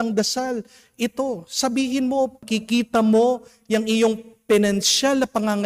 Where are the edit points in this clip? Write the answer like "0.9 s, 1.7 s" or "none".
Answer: 2.4 s